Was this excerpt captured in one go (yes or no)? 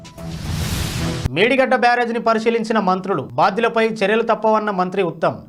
yes